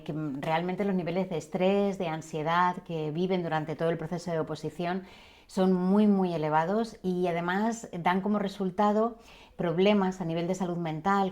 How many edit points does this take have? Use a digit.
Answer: 0